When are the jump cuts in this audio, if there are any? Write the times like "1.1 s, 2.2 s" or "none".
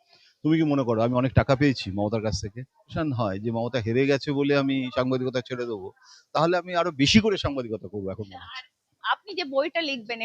2.9 s

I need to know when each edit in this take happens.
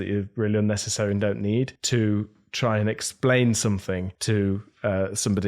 1.8 s, 4.1 s

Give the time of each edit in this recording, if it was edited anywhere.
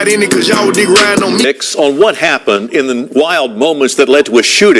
1.4 s

